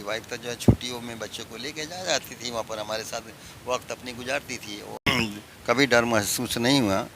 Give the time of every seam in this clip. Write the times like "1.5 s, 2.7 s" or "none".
5.1 s